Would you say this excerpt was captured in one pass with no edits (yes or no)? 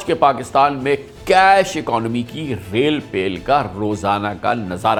yes